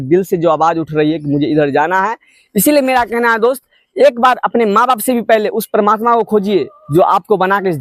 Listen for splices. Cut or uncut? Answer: uncut